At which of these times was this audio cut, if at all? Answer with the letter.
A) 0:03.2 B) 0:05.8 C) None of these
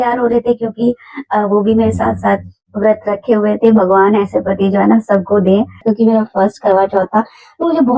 B